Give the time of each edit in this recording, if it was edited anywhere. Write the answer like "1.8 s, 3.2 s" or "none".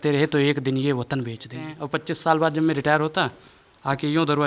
1.8 s